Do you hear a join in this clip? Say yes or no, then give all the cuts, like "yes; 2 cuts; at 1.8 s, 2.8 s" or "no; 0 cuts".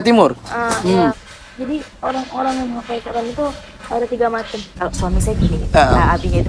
yes; 2 cuts; at 1.2 s, 4.7 s